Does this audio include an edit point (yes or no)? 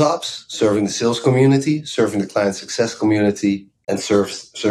yes